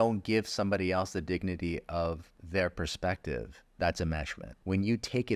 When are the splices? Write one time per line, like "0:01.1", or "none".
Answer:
0:02.3
0:03.6
0:04.4